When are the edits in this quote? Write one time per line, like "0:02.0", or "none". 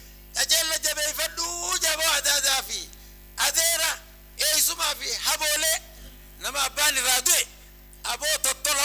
0:06.0